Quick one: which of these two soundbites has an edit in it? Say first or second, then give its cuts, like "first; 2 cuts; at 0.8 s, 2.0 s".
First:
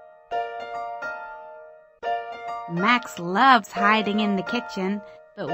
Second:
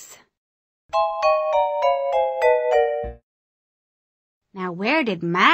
first; 2 cuts; at 1.2 s, 2.2 s